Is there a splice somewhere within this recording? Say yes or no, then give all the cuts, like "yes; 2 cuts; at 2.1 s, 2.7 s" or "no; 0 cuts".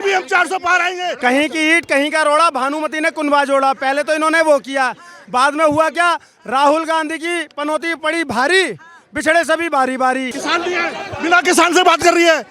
yes; 2 cuts; at 1.2 s, 10.3 s